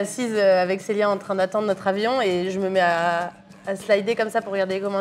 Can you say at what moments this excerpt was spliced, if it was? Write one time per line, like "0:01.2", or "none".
none